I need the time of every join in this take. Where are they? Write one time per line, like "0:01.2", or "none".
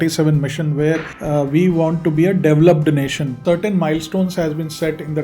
0:01.1
0:03.4